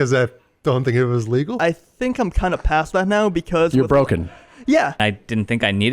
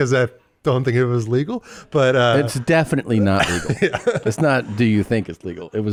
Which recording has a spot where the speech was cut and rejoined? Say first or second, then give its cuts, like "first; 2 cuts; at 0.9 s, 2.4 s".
first; 2 cuts; at 1.6 s, 5.0 s